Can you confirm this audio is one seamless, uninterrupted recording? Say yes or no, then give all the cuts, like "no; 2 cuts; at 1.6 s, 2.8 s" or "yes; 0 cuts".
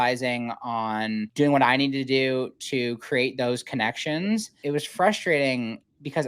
no; 2 cuts; at 1.3 s, 4.5 s